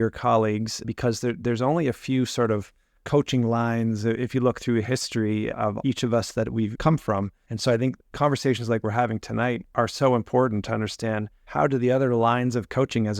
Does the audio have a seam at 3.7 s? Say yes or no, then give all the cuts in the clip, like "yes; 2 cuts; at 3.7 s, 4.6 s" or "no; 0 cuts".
no; 5 cuts; at 0.9 s, 5.6 s, 7.0 s, 8.1 s, 11.4 s